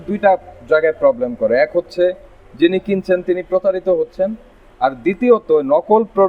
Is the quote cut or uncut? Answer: uncut